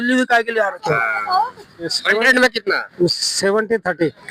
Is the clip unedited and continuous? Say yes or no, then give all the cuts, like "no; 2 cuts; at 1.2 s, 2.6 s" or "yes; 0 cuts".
no; 1 cut; at 2.0 s